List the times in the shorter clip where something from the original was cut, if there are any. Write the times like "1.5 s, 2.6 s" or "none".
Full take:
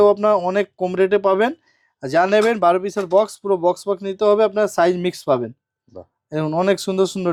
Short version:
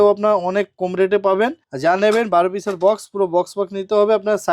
1.7 s